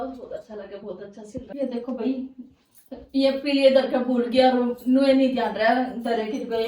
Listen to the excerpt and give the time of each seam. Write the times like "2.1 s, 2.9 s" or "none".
1.6 s